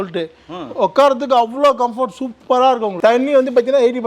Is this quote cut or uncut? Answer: cut